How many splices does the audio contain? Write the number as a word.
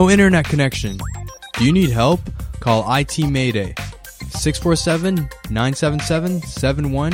zero